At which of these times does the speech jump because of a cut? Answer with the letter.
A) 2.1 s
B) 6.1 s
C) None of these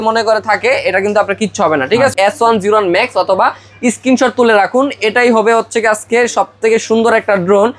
A